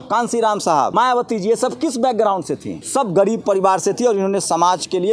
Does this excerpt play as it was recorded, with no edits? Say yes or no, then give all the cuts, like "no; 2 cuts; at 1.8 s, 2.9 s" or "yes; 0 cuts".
no; 2 cuts; at 0.9 s, 2.8 s